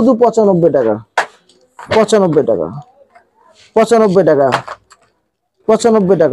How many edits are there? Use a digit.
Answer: 0